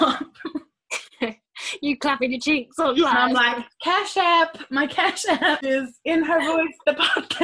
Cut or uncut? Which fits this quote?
cut